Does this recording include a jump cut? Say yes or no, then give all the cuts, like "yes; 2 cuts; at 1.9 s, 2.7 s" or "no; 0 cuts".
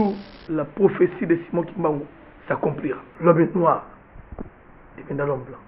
yes; 1 cut; at 3.1 s